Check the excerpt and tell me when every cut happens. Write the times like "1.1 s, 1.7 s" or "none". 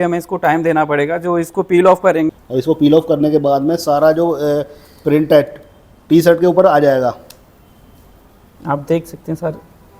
2.4 s